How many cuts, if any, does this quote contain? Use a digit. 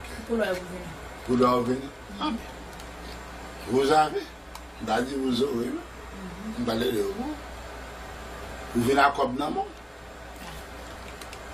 1